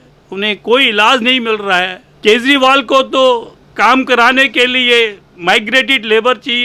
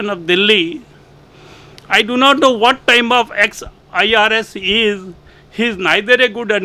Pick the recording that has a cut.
first; 1 cut; at 2.0 s

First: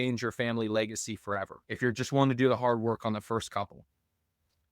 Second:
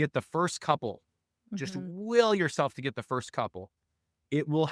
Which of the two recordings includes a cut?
first; 1 cut; at 1.6 s

